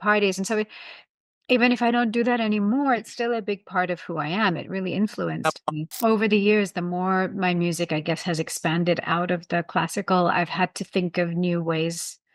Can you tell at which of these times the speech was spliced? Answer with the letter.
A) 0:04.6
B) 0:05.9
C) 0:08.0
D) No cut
B